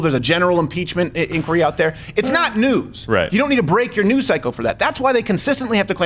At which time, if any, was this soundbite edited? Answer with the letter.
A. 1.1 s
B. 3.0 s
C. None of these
C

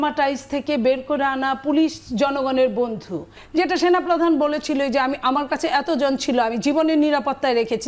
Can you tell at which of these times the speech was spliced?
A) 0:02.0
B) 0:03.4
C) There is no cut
B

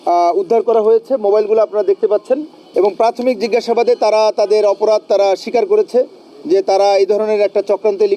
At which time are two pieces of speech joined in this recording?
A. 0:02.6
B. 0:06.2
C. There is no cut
A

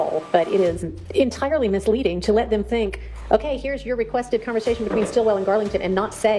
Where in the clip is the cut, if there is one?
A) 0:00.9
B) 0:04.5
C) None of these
A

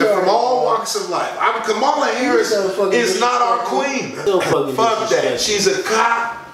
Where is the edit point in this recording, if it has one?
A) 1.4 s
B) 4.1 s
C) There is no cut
B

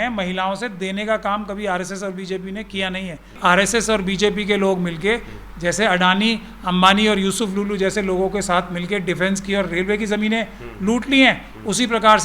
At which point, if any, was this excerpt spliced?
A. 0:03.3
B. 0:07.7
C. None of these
A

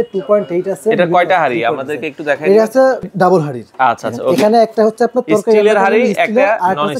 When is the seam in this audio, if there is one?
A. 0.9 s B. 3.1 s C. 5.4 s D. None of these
B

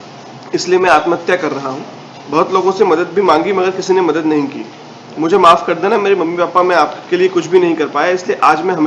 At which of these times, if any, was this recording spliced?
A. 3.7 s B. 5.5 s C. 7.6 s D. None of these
D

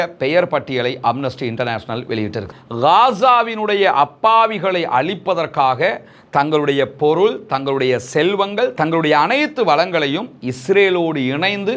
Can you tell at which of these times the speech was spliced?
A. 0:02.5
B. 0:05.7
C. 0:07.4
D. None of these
A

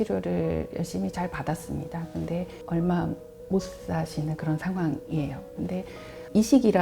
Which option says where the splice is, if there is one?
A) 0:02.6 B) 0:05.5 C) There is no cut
A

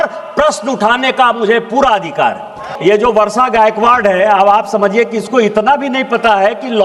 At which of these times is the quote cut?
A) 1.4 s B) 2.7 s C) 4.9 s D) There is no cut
B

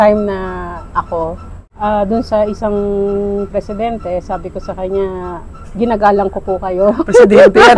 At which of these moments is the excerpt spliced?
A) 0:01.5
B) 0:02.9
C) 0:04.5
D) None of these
A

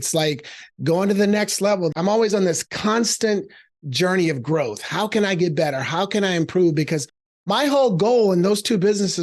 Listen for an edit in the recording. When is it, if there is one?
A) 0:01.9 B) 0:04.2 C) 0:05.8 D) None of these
A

